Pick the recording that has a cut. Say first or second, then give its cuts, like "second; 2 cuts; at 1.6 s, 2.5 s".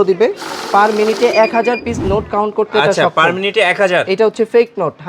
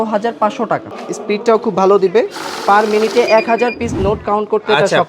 second; 1 cut; at 0.9 s